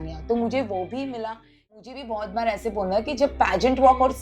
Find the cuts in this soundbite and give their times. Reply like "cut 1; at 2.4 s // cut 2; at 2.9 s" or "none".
cut 1; at 1.8 s